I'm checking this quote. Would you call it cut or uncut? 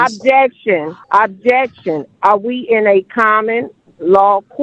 cut